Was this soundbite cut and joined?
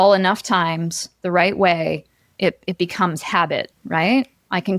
yes; 1 cut; at 3.8 s

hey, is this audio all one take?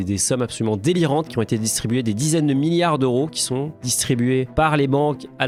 yes; 0 cuts

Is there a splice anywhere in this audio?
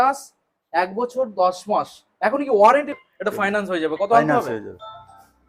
yes; 1 cut; at 2.9 s

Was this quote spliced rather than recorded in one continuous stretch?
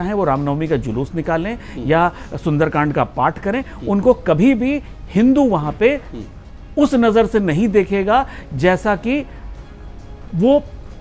no; 0 cuts

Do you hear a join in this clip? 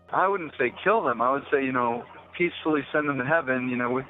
no; 0 cuts

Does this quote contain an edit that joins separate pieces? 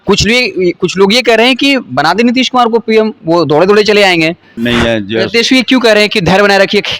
yes; 1 cut; at 4.5 s

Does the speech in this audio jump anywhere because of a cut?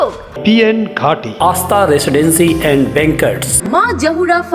no; 0 cuts

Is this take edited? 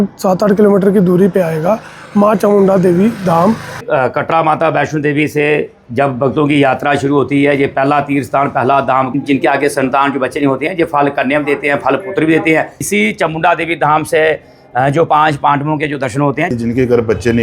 yes; 4 cuts; at 3.8 s, 9.1 s, 12.7 s, 16.5 s

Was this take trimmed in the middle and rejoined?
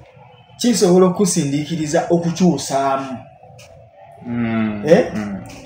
no; 0 cuts

